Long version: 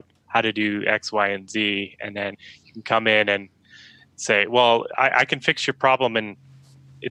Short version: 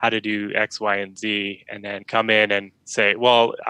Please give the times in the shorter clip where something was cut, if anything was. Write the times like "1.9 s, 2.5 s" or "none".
2.0 s, 2.8 s

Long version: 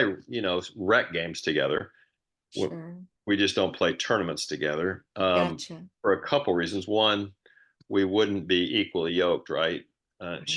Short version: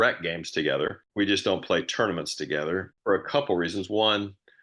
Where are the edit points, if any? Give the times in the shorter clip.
1.0 s, 2.9 s

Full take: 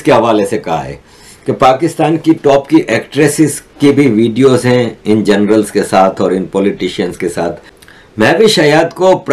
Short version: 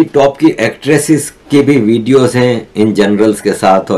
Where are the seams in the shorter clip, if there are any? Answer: none

